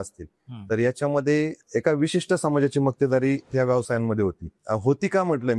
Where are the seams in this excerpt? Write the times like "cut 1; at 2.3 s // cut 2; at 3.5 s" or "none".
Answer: cut 1; at 4.5 s